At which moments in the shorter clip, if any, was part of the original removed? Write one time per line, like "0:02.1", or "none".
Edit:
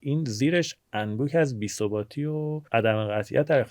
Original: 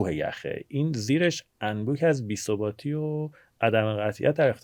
0:02.6